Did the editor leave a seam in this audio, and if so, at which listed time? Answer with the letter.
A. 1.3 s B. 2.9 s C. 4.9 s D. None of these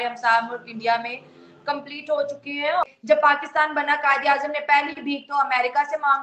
B